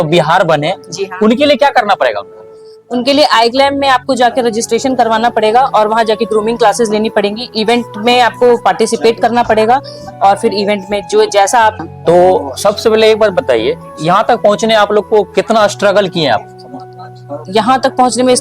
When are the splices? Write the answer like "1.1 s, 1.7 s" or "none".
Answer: 11.8 s